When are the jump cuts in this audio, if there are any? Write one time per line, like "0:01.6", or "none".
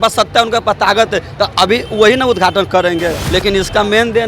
0:03.2